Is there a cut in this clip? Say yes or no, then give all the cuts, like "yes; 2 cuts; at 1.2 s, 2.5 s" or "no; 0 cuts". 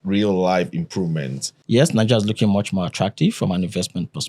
yes; 1 cut; at 1.5 s